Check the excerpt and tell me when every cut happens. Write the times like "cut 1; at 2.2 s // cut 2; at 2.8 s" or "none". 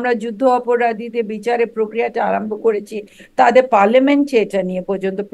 none